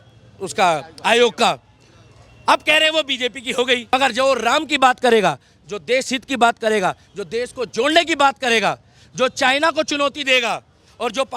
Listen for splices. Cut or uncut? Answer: cut